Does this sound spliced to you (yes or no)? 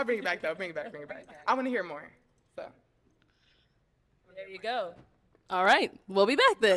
no